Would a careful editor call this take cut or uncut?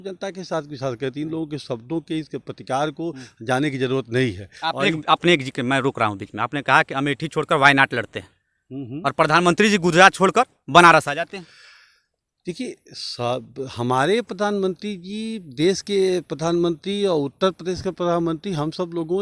uncut